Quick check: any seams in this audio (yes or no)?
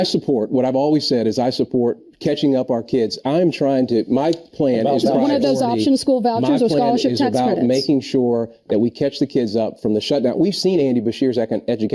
no